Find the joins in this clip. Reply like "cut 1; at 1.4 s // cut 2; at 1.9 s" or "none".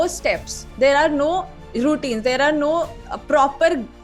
none